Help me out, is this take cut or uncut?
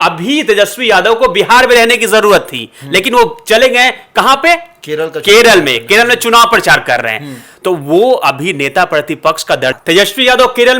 cut